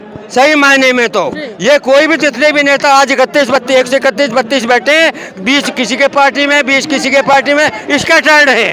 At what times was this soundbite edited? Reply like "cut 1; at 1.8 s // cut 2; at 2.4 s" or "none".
none

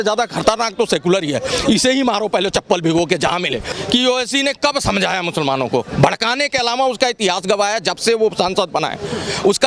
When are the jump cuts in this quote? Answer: cut 1; at 3.7 s

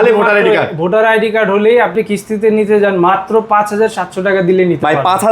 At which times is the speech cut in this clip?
cut 1; at 1.9 s

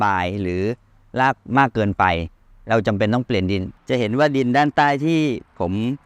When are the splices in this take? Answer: cut 1; at 3.7 s

